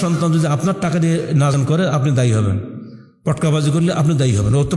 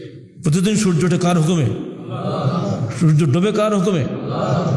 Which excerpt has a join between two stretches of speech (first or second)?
first